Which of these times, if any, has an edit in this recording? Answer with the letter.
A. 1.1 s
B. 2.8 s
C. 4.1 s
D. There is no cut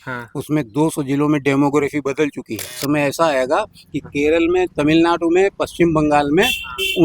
B